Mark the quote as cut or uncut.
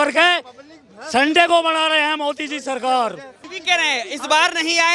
cut